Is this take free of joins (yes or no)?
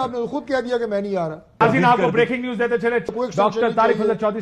no